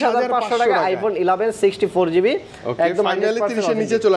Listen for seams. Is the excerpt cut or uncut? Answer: uncut